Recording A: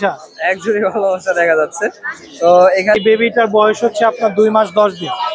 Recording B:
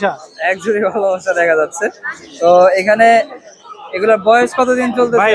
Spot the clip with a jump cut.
A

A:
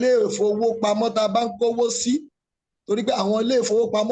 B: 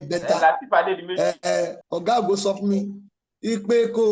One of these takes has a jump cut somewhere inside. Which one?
B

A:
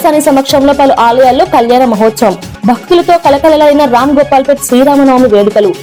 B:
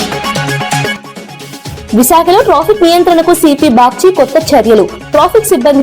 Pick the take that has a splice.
B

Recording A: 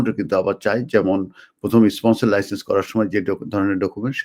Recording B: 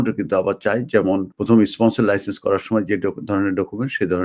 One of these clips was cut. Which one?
B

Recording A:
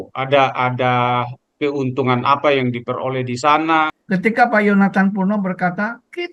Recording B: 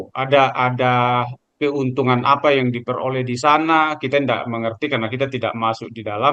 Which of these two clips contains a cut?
A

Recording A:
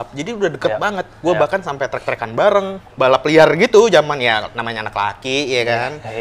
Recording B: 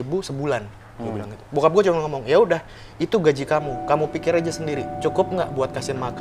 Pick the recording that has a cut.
A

